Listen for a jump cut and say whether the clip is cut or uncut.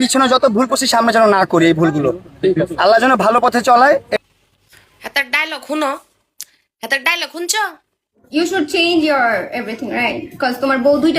cut